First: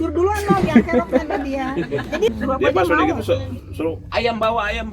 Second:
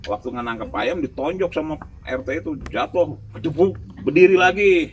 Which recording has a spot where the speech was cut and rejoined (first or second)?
first